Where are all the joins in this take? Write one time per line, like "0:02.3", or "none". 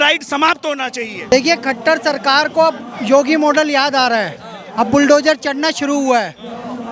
0:01.3